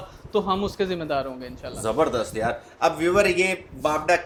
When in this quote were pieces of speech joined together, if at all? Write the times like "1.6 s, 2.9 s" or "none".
none